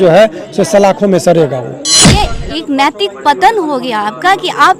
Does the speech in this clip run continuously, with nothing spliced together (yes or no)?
no